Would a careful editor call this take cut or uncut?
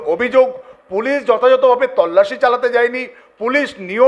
uncut